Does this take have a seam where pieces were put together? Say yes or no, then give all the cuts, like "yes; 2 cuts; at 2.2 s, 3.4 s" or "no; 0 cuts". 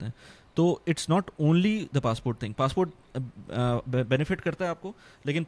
no; 0 cuts